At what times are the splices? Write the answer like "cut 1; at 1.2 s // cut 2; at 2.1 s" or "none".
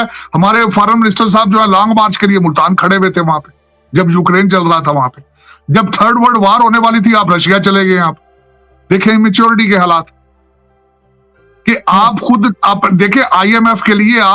none